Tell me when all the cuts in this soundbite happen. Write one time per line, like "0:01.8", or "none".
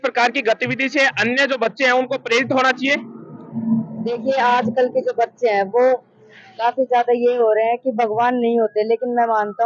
none